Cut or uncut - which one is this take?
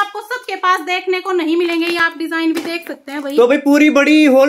uncut